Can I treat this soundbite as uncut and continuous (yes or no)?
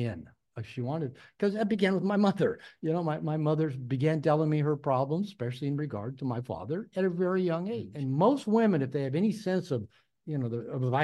no